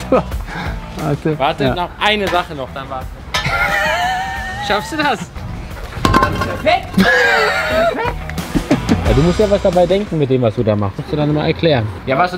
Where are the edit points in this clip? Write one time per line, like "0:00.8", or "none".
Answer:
0:05.3
0:09.0